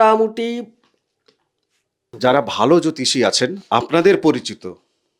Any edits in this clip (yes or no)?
yes